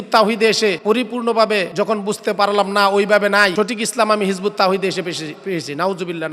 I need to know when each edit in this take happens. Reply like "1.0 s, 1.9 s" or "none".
0.8 s, 1.7 s, 3.5 s